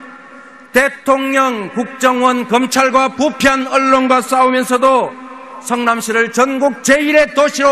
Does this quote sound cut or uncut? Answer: uncut